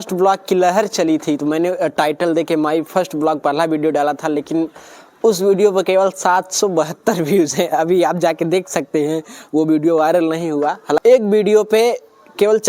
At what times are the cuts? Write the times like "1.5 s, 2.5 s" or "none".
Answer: 11.0 s